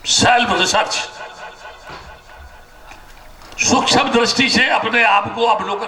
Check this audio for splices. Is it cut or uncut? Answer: uncut